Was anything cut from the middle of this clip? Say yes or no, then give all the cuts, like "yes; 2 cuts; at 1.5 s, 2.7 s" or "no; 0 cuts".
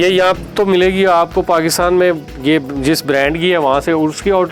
no; 0 cuts